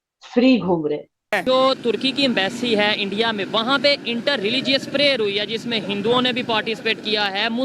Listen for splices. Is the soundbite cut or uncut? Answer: cut